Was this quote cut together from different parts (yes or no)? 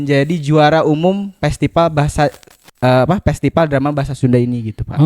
no